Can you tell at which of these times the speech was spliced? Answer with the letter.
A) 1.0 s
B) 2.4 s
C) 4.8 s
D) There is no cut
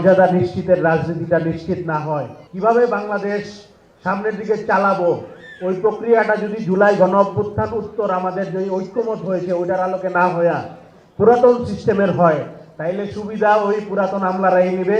B